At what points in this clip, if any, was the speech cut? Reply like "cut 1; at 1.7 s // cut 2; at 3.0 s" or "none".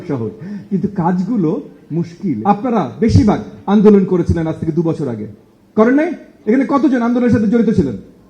cut 1; at 2.4 s